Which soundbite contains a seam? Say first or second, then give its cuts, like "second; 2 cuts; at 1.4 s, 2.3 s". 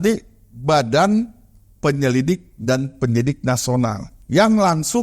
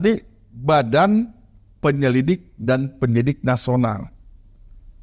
first; 1 cut; at 4.1 s